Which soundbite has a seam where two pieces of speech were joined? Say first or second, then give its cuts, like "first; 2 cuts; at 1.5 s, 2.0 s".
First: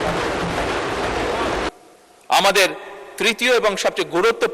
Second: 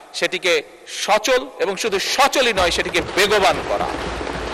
first; 1 cut; at 1.7 s